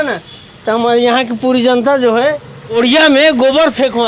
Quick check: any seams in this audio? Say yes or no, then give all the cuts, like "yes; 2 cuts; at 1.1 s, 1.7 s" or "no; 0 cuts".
yes; 1 cut; at 2.8 s